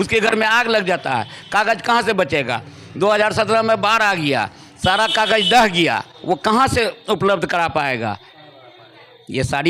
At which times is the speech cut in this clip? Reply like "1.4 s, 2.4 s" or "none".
none